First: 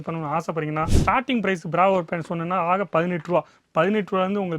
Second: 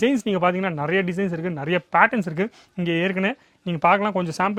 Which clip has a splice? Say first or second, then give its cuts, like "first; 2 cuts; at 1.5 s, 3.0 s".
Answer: first; 1 cut; at 0.9 s